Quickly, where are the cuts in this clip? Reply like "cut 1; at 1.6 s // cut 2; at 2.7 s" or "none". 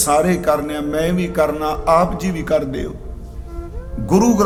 none